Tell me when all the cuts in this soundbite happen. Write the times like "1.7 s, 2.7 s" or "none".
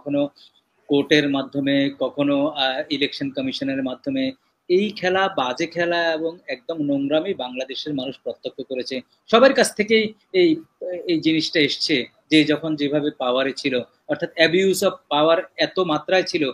none